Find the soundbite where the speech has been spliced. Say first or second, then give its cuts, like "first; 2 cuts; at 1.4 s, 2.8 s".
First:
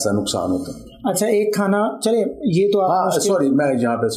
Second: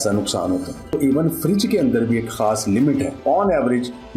second; 2 cuts; at 0.9 s, 3.2 s